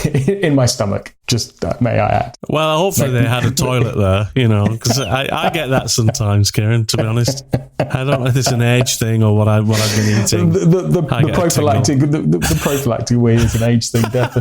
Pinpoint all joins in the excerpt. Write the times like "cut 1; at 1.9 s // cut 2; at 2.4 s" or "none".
cut 1; at 1.1 s